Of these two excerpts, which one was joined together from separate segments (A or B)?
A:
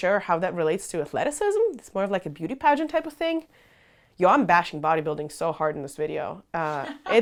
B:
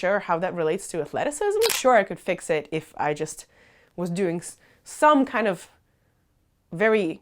B